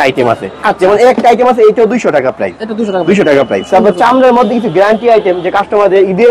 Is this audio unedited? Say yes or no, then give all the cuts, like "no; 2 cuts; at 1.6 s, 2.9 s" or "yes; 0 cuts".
yes; 0 cuts